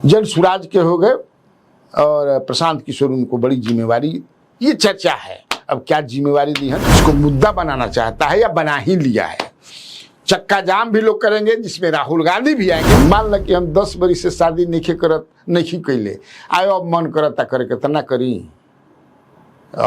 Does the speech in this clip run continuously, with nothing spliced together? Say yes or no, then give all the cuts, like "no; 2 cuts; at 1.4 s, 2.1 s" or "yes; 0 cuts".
no; 2 cuts; at 7.0 s, 12.9 s